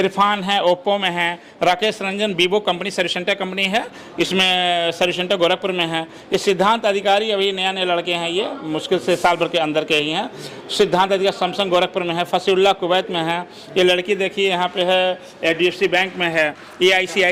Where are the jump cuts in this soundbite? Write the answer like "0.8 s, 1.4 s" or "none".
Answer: none